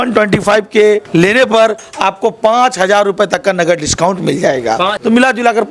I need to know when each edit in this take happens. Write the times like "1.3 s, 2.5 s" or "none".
1.1 s, 4.9 s